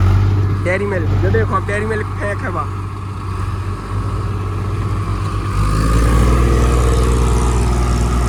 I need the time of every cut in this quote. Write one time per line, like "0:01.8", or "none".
none

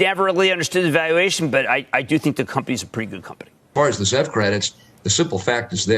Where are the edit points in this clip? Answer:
0:03.7

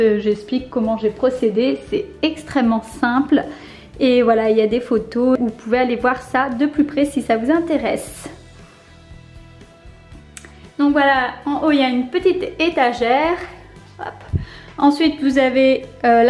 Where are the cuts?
0:05.4

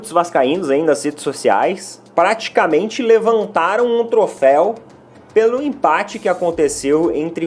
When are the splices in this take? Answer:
0:01.9

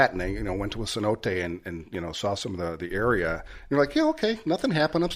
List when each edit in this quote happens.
none

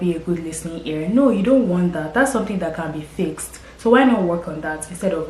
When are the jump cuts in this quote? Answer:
none

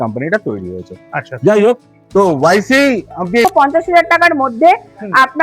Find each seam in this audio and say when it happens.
0:03.4

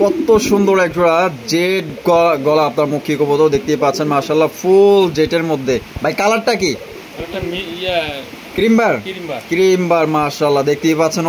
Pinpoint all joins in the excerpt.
none

